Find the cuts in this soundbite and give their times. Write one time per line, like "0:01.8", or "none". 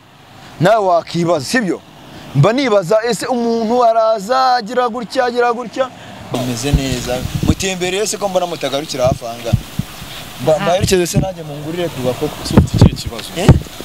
0:06.2

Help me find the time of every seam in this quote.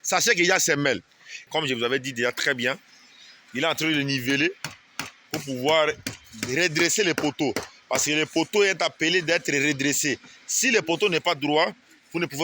0:01.5

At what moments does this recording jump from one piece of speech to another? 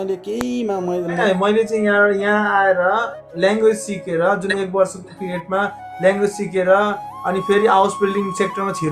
0:01.2

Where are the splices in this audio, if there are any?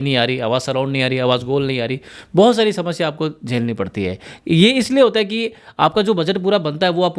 none

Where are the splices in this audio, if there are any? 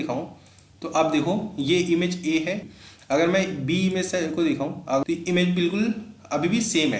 0:02.7
0:05.0

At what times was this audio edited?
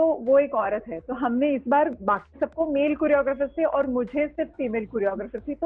none

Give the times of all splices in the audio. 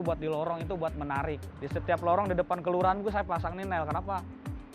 0:01.5

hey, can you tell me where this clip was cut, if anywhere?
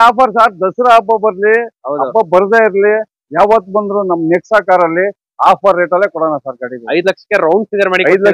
none

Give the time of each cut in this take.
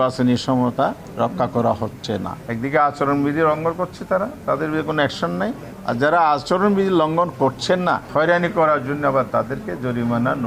0:01.0
0:02.4
0:05.7
0:08.0

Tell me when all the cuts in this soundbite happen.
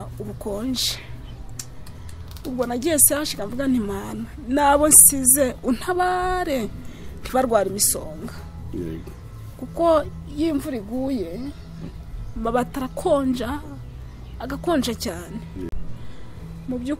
0:15.7

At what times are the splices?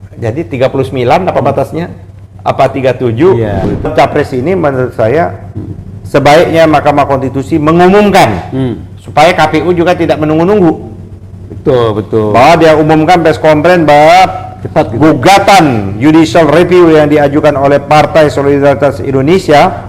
0:03.9

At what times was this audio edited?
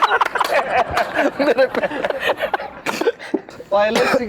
none

